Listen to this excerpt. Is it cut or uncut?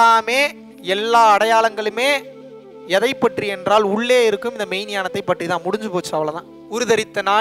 cut